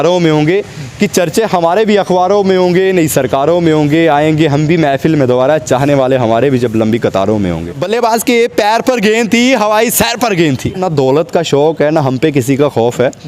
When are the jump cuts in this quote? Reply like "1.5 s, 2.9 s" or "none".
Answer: 7.7 s, 10.8 s

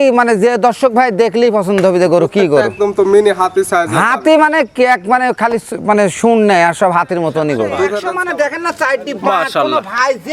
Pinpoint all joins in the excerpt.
8.0 s

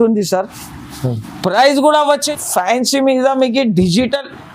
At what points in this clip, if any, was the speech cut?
2.3 s

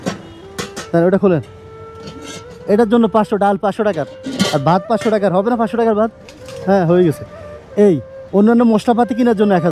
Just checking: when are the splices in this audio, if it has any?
8.1 s

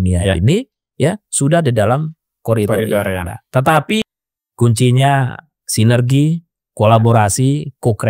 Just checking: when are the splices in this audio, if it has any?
4.0 s

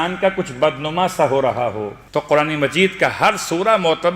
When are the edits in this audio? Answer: 1.9 s

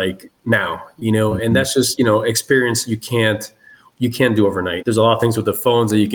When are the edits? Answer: 4.8 s

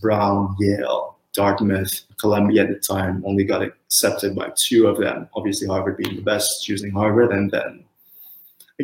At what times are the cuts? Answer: none

